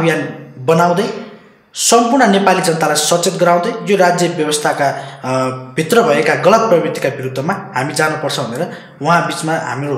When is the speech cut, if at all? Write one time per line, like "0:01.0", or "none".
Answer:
none